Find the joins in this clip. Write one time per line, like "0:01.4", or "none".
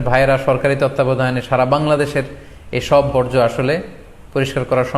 none